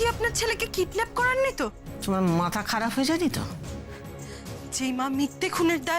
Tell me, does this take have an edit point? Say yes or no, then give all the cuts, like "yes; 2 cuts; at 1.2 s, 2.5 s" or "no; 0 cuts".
yes; 1 cut; at 1.8 s